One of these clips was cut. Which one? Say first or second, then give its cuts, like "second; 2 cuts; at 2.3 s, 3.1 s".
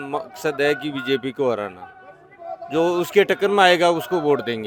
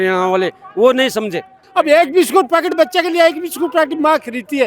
second; 1 cut; at 1.6 s